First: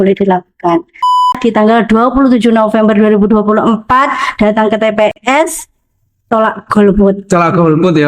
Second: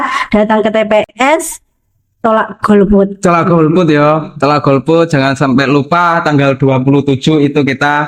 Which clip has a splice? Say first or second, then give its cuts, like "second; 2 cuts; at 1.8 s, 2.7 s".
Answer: first; 1 cut; at 1.3 s